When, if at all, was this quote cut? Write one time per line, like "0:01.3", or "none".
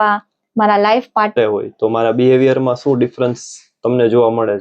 0:01.4